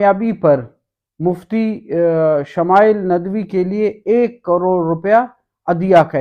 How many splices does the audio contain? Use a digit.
0